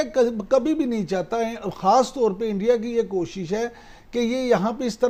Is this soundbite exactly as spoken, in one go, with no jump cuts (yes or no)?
yes